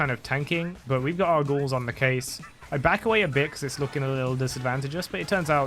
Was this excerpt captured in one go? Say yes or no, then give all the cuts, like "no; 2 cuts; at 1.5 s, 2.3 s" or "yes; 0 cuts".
yes; 0 cuts